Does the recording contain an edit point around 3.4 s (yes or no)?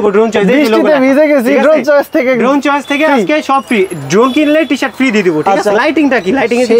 no